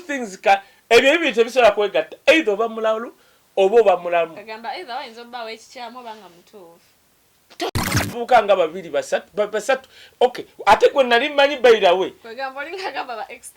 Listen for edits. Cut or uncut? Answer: cut